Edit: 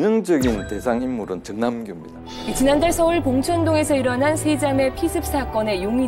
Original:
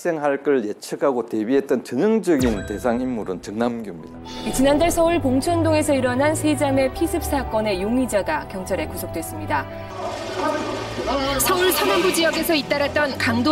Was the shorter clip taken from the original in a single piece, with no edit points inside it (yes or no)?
yes